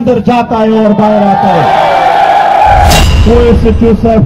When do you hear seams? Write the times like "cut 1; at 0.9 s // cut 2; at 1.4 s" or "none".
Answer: cut 1; at 3.0 s

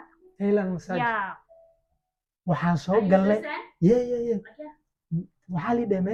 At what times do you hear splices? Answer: none

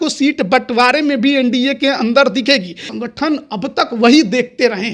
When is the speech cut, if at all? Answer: cut 1; at 2.8 s

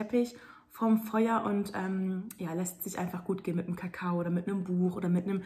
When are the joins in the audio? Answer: none

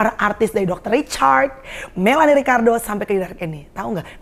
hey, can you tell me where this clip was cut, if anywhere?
none

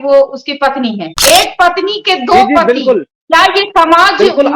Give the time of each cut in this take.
cut 1; at 1.2 s

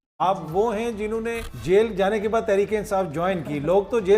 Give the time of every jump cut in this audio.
cut 1; at 1.5 s

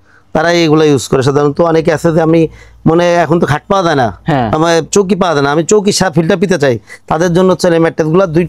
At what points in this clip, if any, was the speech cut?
none

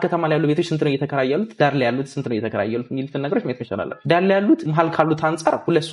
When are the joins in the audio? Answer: cut 1; at 4.0 s // cut 2; at 4.7 s

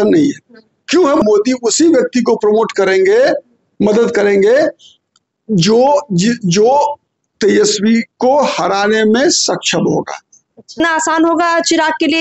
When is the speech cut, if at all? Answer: cut 1; at 1.2 s // cut 2; at 10.8 s

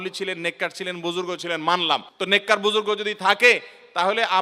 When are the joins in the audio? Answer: cut 1; at 2.1 s

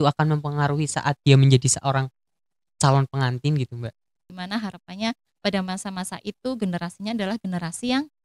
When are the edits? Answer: cut 1; at 4.4 s

